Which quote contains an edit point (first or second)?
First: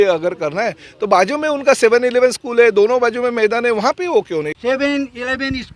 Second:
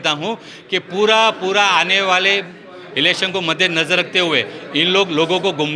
first